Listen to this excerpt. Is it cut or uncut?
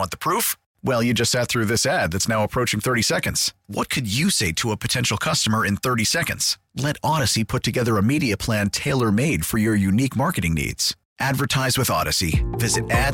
uncut